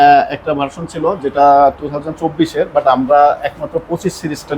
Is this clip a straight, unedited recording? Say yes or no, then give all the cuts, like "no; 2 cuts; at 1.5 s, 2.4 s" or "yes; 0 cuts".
yes; 0 cuts